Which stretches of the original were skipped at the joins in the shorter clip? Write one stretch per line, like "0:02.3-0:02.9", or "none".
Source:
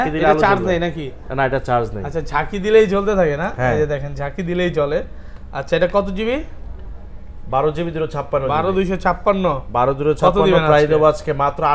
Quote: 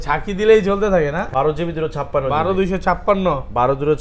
0:03.5-0:07.4